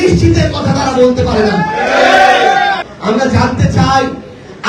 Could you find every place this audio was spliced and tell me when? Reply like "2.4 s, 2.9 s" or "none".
2.9 s